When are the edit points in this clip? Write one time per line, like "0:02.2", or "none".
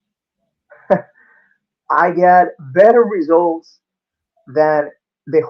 none